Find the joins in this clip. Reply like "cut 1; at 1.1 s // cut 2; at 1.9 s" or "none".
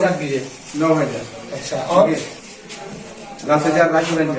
none